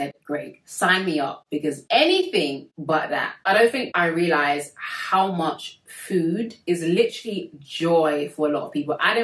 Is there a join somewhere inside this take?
yes; 3 cuts; at 1.8 s, 3.3 s, 3.9 s

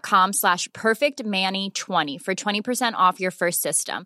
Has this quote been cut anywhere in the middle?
no; 0 cuts

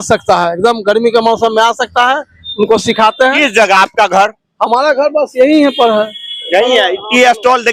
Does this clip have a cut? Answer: no; 0 cuts

